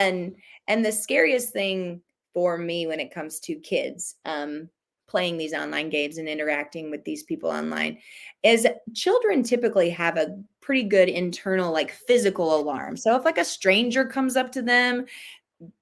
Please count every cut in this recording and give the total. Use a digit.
0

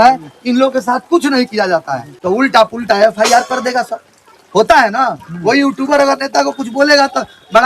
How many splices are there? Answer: 1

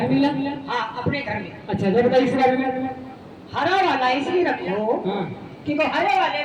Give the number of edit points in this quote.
0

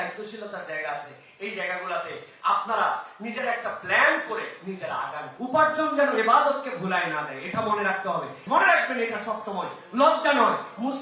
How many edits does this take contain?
2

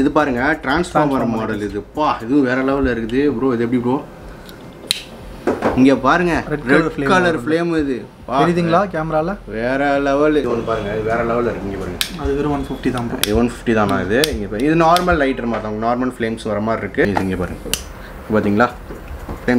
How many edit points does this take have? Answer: 2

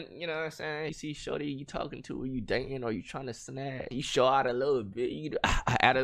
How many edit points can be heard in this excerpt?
2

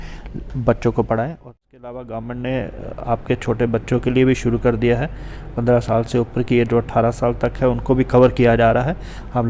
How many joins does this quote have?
1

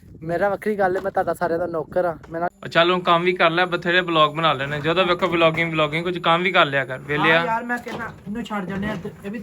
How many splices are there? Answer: 1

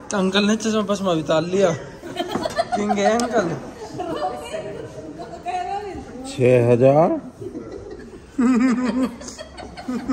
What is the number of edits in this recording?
0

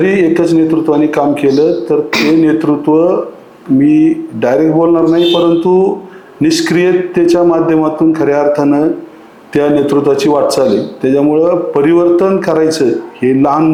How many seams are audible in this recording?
0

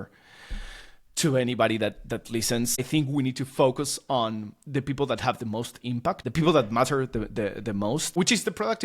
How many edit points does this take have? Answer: 3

